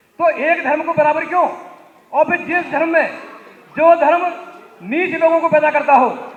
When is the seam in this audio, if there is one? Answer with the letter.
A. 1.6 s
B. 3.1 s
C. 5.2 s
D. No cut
D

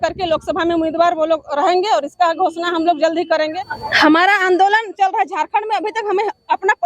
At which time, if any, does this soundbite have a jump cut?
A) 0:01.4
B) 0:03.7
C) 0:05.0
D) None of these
B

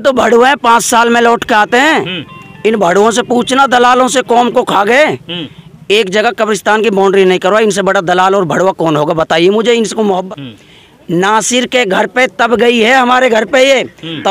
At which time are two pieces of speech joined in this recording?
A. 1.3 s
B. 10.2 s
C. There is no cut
B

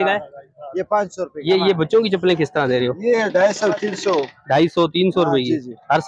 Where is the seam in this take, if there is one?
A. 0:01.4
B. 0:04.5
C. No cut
A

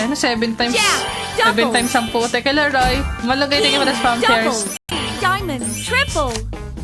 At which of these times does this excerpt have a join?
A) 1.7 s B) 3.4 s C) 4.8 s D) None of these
C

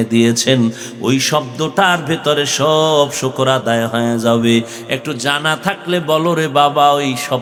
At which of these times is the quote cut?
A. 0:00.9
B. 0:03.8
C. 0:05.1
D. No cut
D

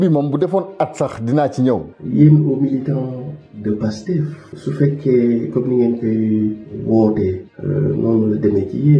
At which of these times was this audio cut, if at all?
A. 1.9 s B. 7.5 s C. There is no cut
A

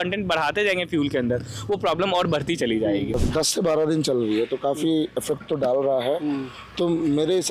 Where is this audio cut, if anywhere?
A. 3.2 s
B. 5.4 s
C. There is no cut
A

